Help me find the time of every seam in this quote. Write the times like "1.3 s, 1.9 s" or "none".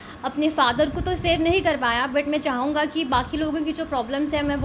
none